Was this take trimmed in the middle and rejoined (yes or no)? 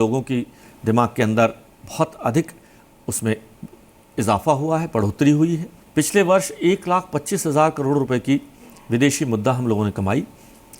yes